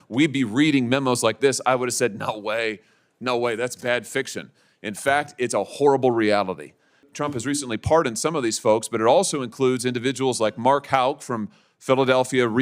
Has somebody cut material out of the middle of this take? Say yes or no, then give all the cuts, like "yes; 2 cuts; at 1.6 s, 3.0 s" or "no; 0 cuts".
yes; 1 cut; at 7.0 s